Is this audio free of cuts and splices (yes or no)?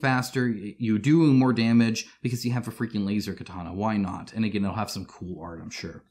yes